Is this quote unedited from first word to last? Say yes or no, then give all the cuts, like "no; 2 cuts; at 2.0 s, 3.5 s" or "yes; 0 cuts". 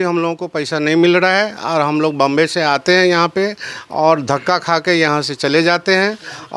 yes; 0 cuts